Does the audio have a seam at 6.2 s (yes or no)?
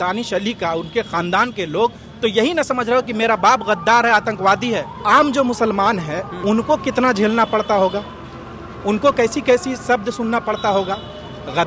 yes